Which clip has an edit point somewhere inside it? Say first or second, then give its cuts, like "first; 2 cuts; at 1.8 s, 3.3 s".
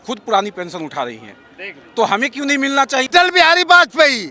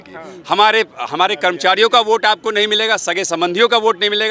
first; 1 cut; at 3.1 s